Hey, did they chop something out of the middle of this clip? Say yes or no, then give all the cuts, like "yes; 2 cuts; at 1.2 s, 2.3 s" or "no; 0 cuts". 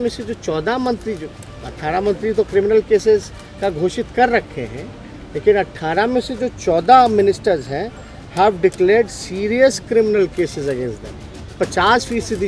yes; 1 cut; at 11.6 s